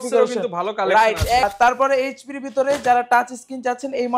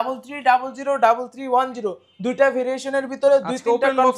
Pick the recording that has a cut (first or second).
first